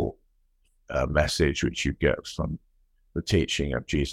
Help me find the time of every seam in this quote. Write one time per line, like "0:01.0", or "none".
none